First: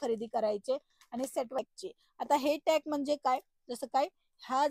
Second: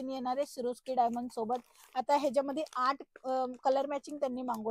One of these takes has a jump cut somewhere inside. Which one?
first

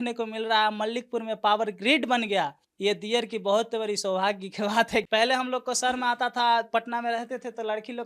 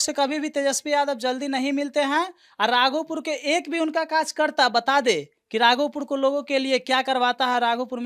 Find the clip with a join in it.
first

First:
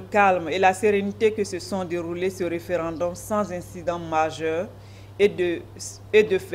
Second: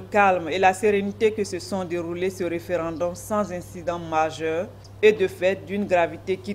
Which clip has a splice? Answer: second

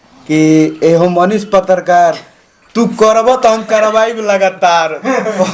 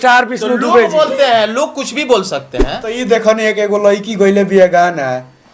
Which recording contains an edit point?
second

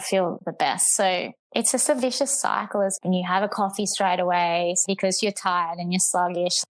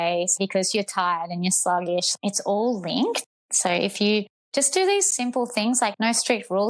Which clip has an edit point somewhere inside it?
first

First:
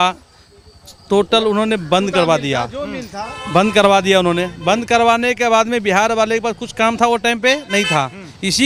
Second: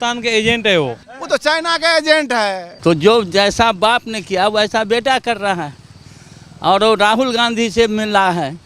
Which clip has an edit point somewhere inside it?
second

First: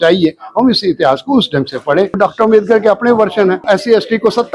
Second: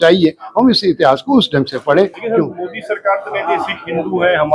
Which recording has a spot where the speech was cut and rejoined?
first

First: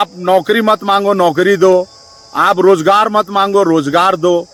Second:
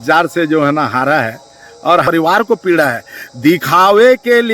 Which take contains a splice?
second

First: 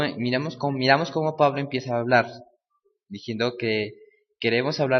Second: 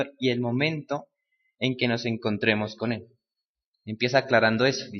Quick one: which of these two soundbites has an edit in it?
second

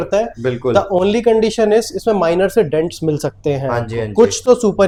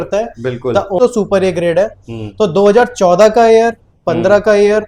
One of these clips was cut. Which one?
second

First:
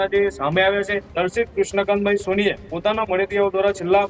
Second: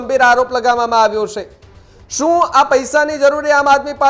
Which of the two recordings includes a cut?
first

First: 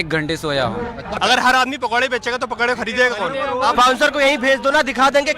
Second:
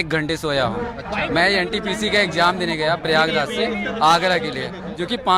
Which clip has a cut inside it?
first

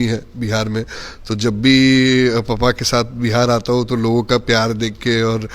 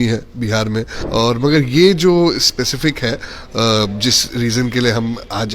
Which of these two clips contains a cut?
second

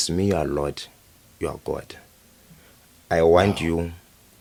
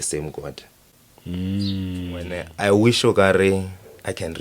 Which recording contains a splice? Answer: second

